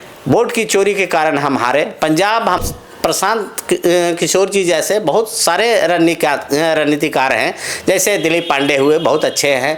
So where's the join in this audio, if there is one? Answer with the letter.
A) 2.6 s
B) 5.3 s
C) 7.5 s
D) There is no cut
A